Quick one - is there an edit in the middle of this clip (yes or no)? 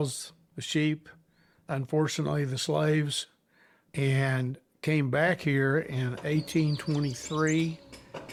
no